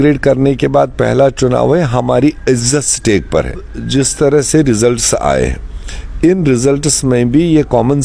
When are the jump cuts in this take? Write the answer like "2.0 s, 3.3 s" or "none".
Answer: 3.8 s